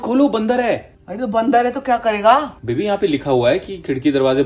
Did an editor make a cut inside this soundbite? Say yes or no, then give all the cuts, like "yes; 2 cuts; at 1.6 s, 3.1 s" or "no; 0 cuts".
no; 0 cuts